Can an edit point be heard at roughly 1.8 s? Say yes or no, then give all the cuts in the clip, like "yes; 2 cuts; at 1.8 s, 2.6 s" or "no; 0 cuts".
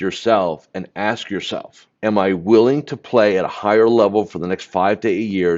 yes; 1 cut; at 1.8 s